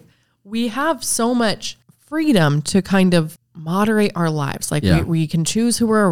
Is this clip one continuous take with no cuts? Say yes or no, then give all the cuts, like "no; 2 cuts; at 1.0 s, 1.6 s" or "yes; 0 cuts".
no; 1 cut; at 3.3 s